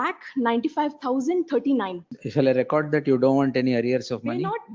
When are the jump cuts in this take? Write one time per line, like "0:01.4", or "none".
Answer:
0:02.0

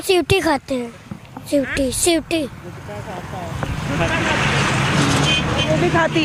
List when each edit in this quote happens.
none

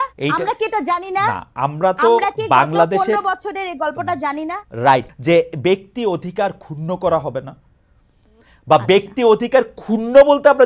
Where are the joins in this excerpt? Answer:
0:05.1

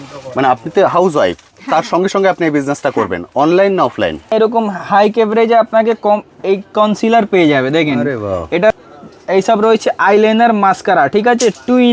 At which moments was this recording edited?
0:04.3
0:08.7

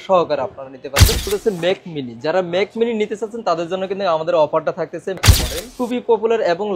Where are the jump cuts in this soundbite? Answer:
0:01.3
0:05.2

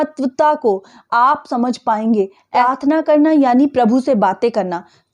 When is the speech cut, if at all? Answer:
0:02.4

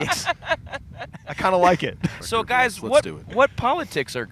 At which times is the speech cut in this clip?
0:02.2

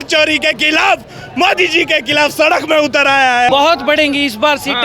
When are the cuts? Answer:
0:03.5

